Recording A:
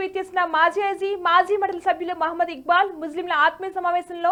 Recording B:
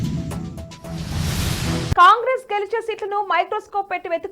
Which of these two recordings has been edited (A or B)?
B